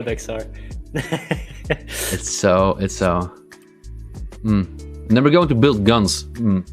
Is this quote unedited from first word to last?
yes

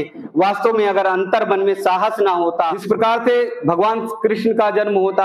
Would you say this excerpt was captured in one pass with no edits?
no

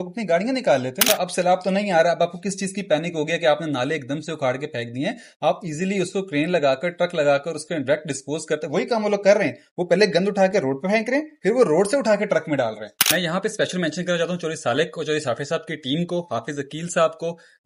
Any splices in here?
yes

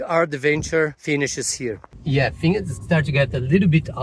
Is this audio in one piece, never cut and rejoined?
no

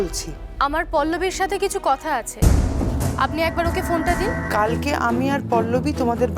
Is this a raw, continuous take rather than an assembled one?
no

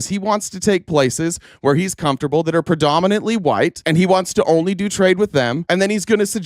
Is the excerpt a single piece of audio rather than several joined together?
no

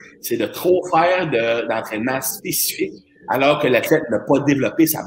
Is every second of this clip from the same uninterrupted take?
yes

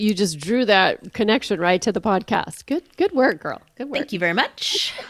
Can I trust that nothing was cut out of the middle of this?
yes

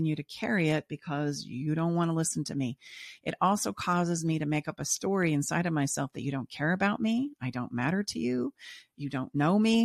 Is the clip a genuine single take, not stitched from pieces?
yes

